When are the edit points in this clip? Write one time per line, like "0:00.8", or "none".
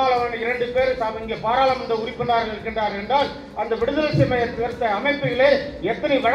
none